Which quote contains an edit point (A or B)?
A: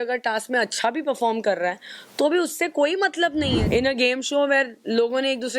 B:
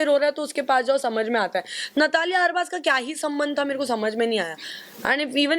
A